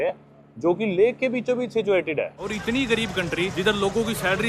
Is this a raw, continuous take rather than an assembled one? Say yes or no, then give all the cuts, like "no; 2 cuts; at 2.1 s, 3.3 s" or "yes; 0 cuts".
no; 2 cuts; at 2.4 s, 3.5 s